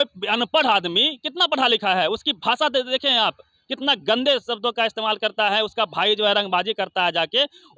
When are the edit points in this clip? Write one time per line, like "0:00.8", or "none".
none